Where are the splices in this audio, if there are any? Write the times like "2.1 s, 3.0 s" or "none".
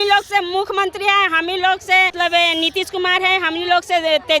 2.1 s

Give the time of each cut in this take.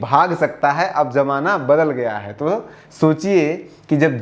none

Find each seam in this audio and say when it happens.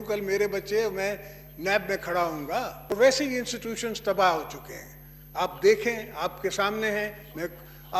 2.8 s

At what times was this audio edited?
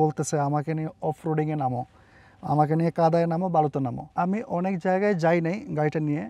4.0 s

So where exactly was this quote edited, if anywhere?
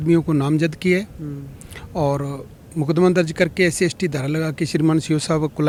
none

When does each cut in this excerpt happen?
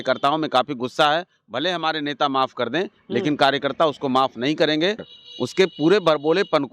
5.1 s

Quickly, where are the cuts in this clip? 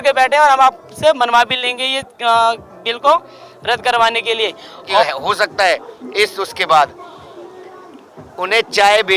4.9 s

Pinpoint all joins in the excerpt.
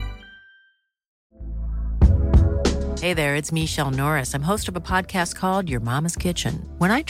1.2 s

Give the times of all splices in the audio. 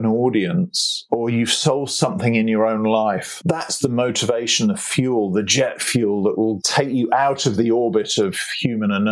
1.0 s, 3.3 s, 6.6 s

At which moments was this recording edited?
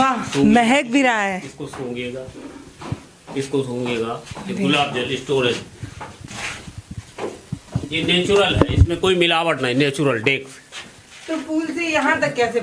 none

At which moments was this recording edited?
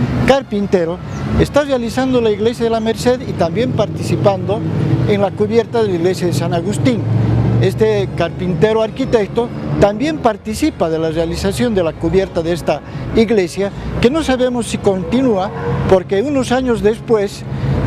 none

